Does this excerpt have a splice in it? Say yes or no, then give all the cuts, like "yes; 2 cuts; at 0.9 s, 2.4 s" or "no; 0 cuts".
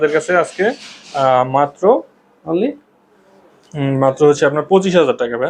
no; 0 cuts